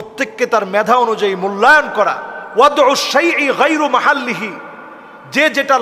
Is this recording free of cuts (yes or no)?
yes